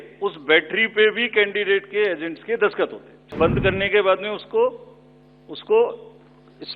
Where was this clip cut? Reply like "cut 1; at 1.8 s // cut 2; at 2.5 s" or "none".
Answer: cut 1; at 3.4 s